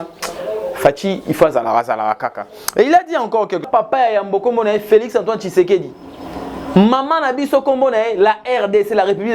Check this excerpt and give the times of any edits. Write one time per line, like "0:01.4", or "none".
0:03.7